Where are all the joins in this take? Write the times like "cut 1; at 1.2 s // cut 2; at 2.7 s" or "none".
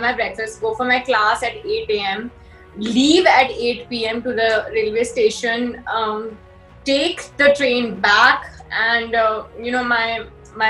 none